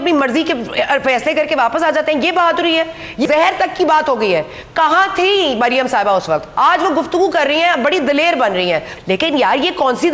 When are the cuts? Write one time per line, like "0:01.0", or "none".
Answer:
0:03.3
0:06.5
0:08.9